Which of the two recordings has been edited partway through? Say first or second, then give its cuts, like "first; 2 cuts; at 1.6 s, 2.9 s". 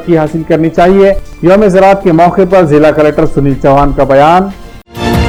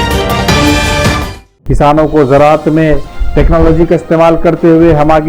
second; 1 cut; at 1.2 s